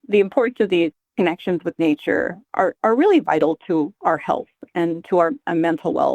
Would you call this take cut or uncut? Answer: cut